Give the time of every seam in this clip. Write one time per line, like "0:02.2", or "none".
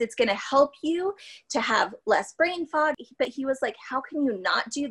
0:03.0